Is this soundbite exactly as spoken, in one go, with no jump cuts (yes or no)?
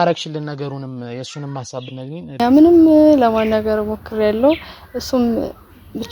no